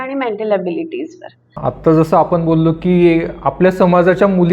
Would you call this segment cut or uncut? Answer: cut